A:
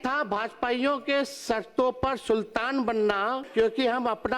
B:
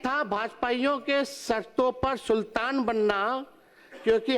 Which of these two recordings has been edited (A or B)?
A